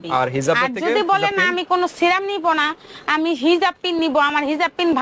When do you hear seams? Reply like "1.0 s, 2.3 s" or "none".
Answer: none